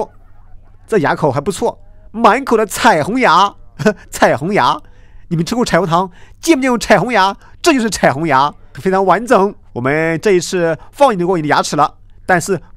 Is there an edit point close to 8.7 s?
yes; 2 cuts; at 8.7 s, 9.7 s

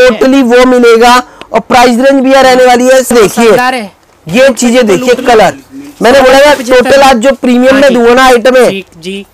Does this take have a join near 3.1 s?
yes; 1 cut; at 3.1 s

